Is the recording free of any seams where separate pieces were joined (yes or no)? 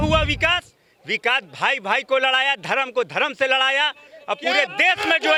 yes